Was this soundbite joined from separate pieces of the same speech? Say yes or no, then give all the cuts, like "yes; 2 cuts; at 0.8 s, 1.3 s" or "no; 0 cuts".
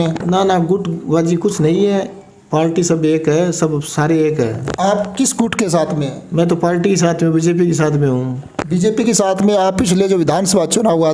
no; 0 cuts